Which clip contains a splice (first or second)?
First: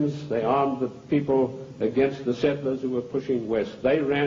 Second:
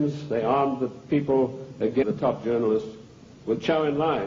first